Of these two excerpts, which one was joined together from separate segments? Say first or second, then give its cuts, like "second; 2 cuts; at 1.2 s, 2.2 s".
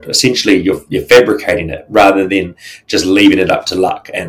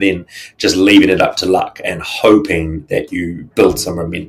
second; 1 cut; at 3.4 s